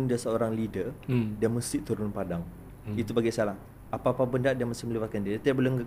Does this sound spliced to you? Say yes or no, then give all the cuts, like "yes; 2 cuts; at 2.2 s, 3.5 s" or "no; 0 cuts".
yes; 1 cut; at 3.7 s